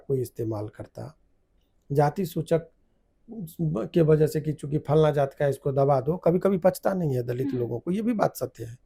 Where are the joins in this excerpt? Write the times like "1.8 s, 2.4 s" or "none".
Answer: none